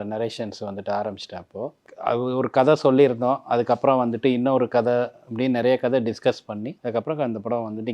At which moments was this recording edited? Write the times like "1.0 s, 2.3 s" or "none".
1.9 s, 6.7 s